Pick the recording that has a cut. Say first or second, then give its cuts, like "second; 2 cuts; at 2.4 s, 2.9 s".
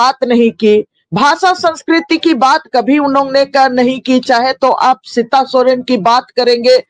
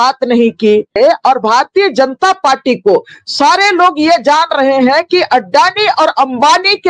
second; 1 cut; at 1.0 s